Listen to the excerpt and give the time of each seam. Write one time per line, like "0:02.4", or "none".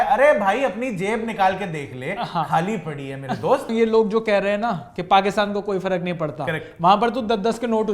0:03.7